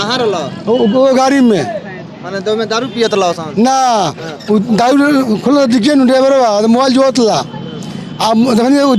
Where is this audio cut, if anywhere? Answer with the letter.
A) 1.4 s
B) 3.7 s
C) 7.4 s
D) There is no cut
D